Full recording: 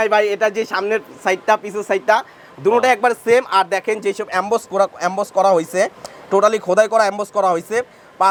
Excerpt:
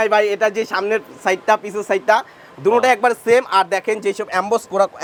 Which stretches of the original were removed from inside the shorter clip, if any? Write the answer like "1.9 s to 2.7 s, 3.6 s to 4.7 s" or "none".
none